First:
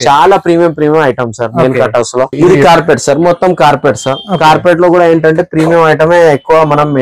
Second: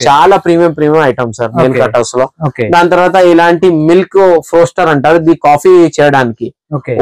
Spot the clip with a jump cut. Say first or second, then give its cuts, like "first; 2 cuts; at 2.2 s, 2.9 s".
first; 1 cut; at 2.3 s